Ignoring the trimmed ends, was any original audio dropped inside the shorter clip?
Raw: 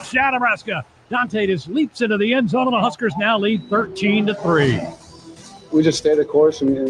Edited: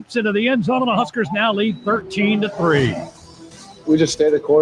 no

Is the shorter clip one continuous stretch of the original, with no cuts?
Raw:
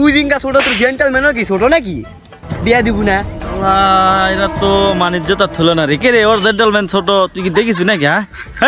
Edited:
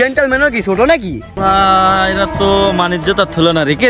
no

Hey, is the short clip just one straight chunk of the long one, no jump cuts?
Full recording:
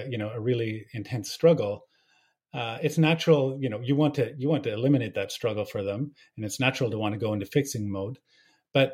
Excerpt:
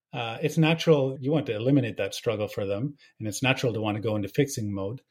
no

